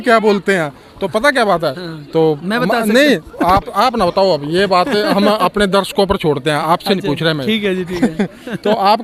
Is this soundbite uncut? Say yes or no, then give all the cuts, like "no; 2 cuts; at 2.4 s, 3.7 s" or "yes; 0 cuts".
yes; 0 cuts